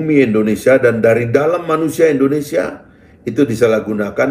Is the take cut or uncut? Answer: uncut